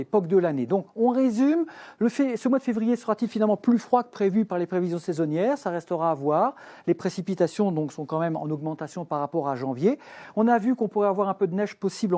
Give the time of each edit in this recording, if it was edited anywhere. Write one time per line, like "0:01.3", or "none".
none